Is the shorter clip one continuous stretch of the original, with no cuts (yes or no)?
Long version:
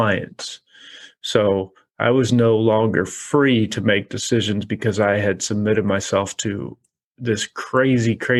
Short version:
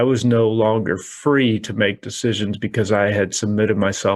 yes